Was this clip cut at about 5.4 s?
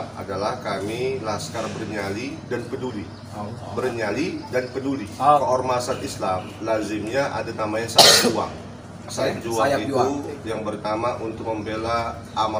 yes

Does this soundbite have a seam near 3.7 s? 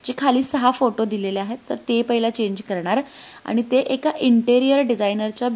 no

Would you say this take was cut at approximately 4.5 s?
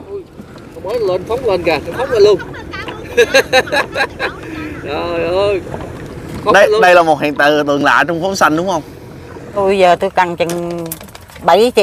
no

